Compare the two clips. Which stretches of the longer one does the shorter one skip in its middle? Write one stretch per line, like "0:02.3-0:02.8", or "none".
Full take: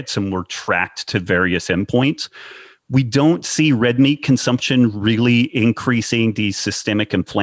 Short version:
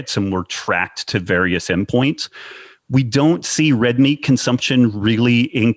none